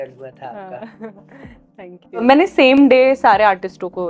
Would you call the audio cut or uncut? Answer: cut